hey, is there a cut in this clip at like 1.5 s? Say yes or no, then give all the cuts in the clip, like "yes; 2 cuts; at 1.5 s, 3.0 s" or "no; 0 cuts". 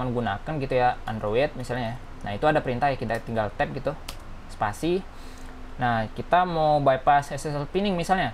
no; 0 cuts